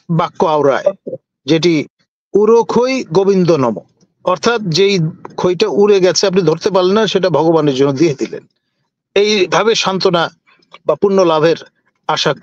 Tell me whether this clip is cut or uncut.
uncut